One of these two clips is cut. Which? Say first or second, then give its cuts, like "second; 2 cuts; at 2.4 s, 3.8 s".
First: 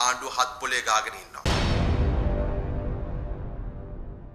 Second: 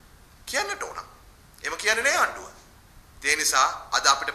first; 1 cut; at 1.4 s